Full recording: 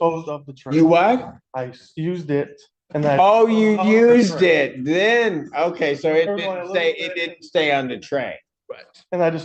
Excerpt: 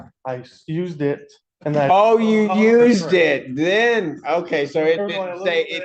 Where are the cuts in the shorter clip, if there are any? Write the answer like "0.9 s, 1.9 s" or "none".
none